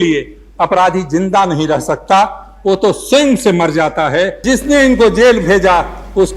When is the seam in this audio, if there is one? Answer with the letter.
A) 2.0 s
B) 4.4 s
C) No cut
B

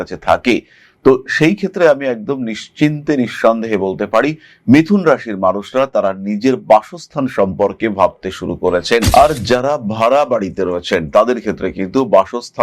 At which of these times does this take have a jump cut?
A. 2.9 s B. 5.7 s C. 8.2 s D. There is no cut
D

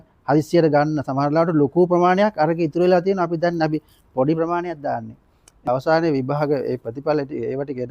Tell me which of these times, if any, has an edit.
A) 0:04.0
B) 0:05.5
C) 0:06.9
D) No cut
B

